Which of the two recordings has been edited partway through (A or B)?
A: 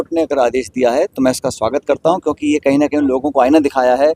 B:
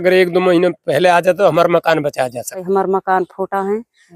B